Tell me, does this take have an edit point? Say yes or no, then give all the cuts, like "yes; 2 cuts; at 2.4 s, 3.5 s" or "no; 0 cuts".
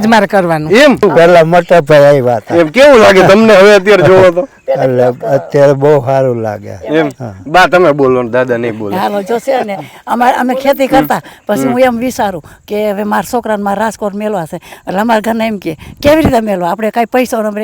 yes; 1 cut; at 1.0 s